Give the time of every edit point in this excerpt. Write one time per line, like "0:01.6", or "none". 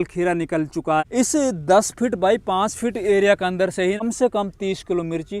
0:01.0
0:04.0